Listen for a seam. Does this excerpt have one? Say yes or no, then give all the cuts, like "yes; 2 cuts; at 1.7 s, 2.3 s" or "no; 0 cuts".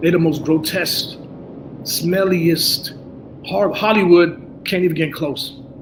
no; 0 cuts